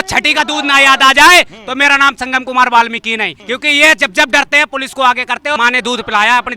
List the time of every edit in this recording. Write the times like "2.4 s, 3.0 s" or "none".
3.4 s, 5.6 s